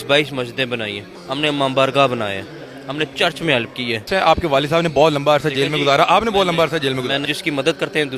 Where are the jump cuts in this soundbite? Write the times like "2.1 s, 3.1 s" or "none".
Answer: 1.1 s, 4.0 s, 7.2 s

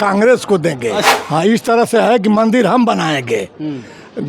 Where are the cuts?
1.1 s

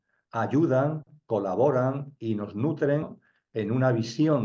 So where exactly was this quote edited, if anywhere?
3.2 s

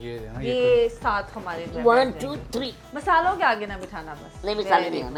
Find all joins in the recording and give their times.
none

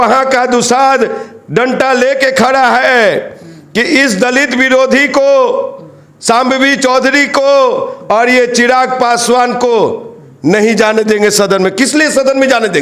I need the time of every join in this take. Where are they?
none

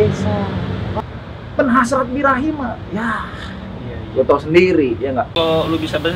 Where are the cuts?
1.0 s, 5.3 s

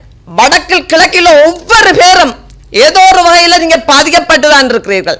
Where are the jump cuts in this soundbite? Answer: none

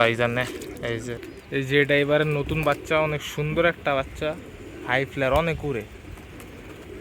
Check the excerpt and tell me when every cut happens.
1.3 s

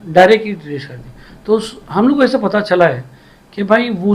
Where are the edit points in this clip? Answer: none

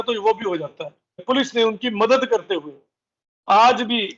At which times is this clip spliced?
1.2 s

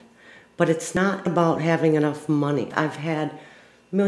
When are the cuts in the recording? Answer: 1.0 s, 2.7 s

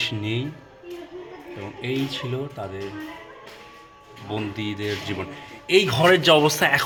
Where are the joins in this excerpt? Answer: none

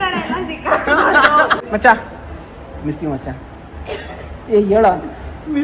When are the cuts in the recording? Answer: 1.6 s

